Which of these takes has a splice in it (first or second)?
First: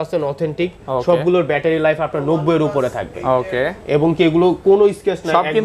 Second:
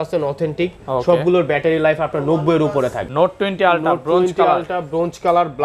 second